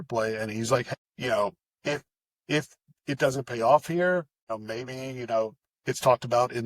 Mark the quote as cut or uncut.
cut